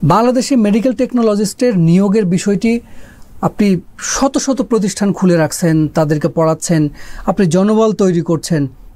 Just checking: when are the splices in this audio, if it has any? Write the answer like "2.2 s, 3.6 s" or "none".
none